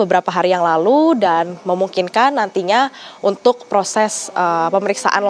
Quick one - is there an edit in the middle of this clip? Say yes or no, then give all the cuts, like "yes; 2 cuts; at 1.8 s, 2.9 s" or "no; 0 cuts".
no; 0 cuts